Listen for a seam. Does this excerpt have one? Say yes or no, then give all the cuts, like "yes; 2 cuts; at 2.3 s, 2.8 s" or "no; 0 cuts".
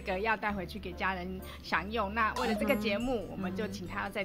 no; 0 cuts